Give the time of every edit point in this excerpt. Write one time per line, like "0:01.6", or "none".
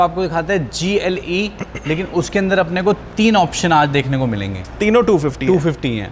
0:04.7